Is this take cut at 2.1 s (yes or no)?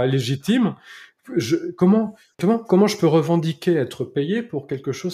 yes